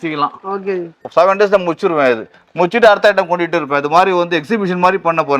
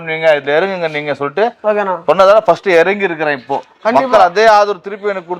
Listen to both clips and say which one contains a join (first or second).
first